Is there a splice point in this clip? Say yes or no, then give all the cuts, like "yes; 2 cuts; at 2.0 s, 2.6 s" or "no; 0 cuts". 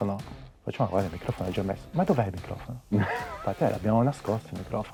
no; 0 cuts